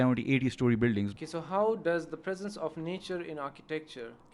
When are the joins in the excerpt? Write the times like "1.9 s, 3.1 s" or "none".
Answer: 1.1 s